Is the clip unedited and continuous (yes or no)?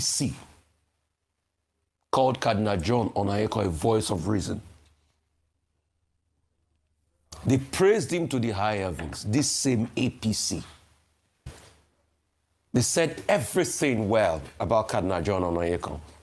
yes